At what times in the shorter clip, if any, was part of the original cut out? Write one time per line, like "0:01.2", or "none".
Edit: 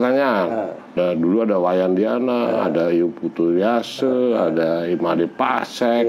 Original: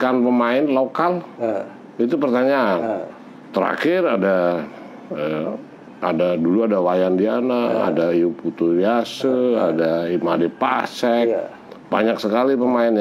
0:00.9